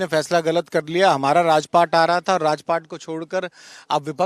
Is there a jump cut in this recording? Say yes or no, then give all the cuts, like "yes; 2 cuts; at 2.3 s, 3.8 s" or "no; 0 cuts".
no; 0 cuts